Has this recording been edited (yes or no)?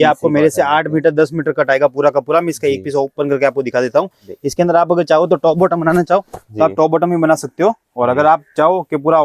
no